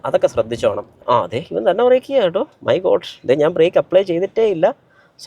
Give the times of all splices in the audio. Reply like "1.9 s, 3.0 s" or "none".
1.0 s